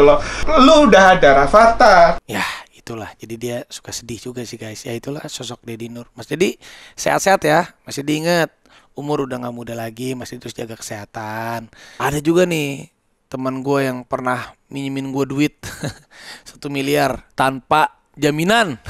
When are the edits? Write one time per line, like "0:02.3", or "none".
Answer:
0:11.9